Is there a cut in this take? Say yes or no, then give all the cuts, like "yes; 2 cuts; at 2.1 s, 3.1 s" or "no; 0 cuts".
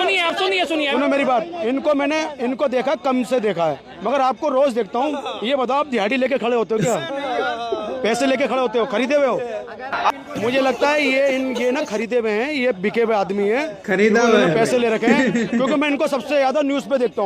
yes; 1 cut; at 0.9 s